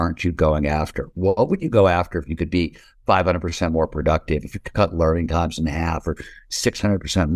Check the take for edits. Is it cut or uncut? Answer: uncut